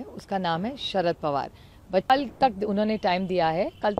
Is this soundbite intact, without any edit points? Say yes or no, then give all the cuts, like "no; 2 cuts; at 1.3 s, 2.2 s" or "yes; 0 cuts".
no; 1 cut; at 2.1 s